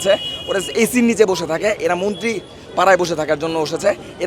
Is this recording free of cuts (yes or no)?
yes